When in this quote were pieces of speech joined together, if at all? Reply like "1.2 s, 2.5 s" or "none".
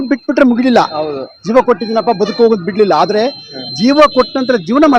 none